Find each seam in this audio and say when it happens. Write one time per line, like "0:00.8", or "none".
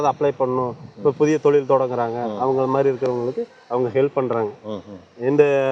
none

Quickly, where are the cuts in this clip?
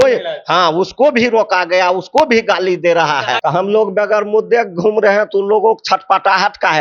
0:03.3

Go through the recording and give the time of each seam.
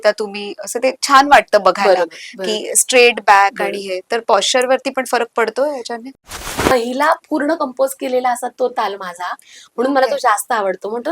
0:06.1

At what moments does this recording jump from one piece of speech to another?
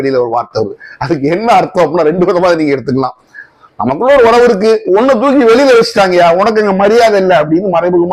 none

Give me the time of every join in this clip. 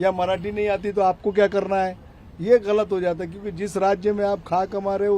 none

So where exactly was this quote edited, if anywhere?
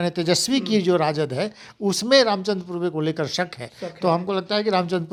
none

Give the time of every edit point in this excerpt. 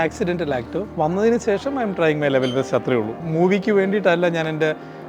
0:00.9
0:03.2

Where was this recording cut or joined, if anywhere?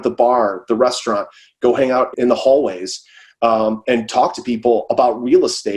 0:02.1

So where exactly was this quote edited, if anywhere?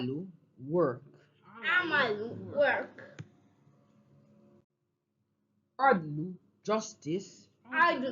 0:06.1

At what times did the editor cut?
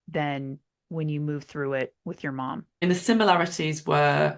0:02.8

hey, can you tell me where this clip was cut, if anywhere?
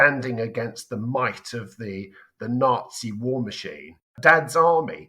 0:04.2

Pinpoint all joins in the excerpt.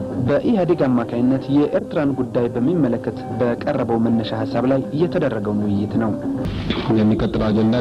0:06.4

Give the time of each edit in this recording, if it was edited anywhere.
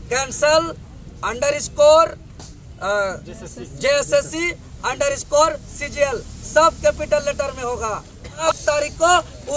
0:08.4

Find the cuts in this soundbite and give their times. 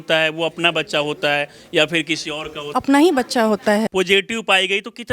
0:02.7
0:03.9

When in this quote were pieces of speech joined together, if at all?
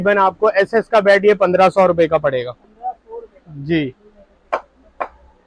none

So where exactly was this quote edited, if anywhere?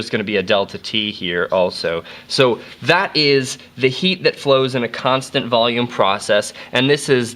0:06.2

